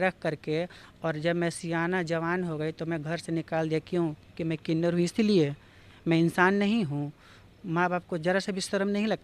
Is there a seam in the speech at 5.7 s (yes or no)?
no